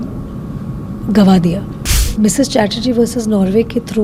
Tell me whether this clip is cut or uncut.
cut